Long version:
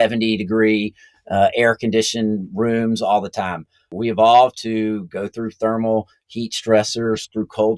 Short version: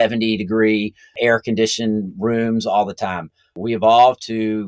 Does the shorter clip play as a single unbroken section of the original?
no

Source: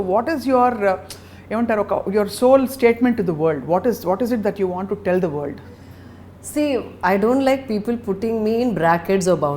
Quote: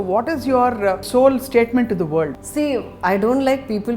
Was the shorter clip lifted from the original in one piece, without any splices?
no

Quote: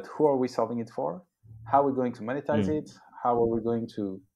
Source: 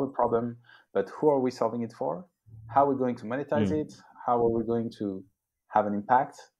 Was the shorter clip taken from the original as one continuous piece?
yes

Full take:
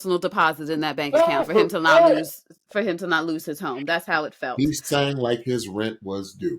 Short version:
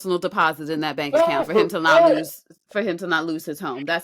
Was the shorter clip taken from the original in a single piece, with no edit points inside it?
yes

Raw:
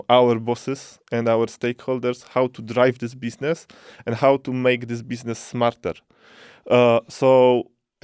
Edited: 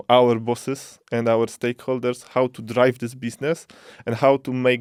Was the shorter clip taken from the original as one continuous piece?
yes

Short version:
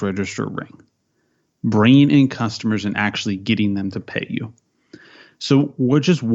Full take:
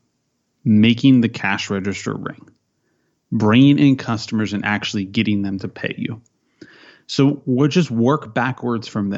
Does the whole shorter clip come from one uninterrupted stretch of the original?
yes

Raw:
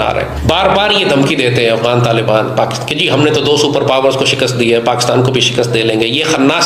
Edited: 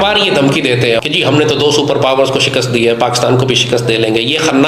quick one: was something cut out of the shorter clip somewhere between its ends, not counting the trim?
yes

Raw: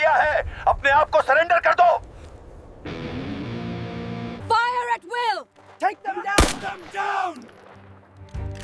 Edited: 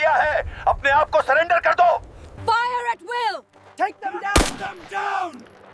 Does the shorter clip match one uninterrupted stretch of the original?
no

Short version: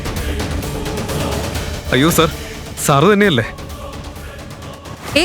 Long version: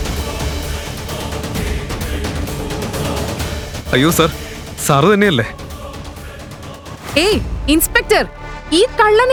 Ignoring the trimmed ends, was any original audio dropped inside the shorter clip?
yes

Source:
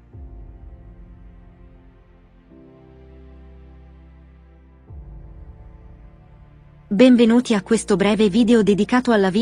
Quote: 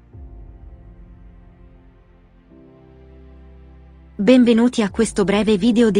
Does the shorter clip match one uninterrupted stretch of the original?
no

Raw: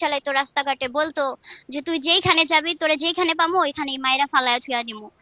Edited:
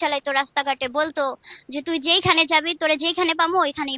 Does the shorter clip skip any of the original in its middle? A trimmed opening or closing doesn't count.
no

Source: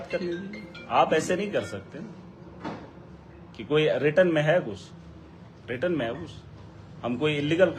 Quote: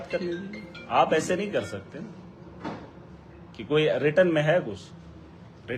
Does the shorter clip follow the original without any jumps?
yes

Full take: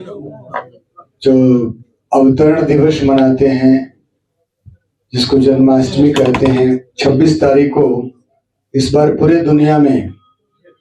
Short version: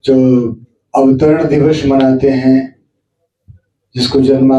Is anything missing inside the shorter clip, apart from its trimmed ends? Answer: no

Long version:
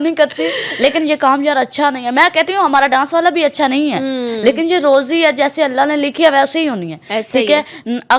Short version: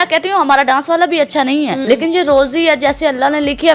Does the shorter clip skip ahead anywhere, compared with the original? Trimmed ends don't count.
yes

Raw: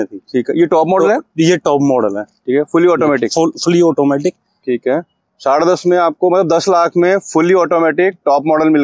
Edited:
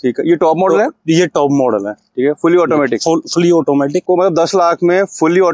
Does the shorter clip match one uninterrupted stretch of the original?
no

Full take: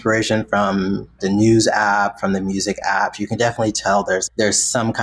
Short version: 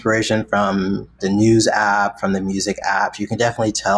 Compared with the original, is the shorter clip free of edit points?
yes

